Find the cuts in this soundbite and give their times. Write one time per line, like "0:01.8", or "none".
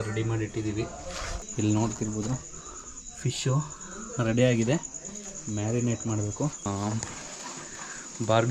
0:01.4
0:06.7